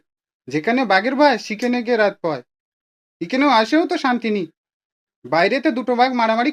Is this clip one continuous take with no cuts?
yes; 0 cuts

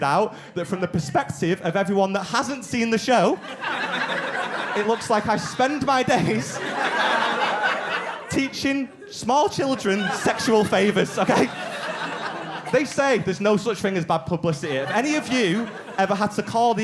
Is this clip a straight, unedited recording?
yes; 0 cuts

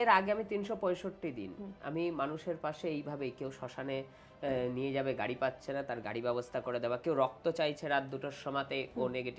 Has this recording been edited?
no; 0 cuts

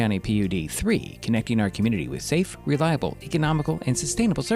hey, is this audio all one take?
yes; 0 cuts

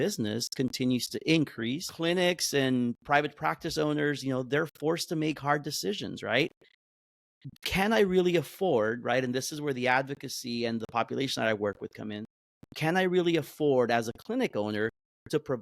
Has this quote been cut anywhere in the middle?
yes; 1 cut; at 1.9 s

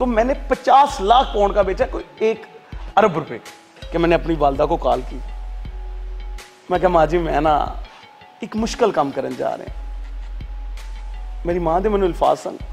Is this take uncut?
yes; 0 cuts

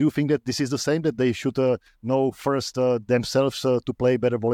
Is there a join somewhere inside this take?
no; 0 cuts

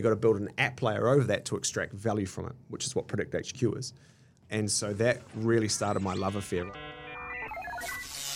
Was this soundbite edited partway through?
yes; 2 cuts; at 4.4 s, 6.8 s

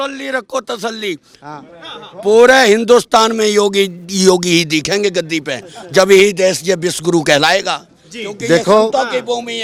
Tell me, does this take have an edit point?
no; 0 cuts

